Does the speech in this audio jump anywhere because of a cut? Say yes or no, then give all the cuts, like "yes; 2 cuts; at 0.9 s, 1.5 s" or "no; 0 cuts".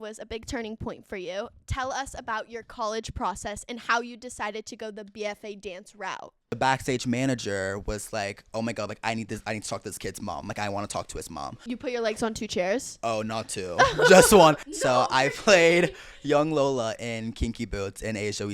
yes; 3 cuts; at 6.6 s, 11.7 s, 14.7 s